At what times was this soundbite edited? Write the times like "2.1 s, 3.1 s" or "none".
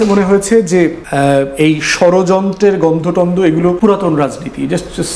1.0 s, 3.8 s